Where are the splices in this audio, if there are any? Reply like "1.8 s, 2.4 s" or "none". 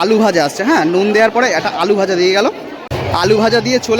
3.0 s

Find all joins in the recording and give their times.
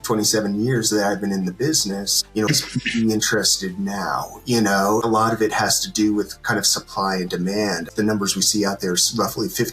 2.5 s, 5.0 s, 7.8 s

